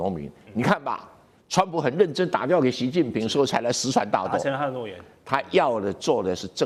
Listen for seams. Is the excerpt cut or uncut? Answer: uncut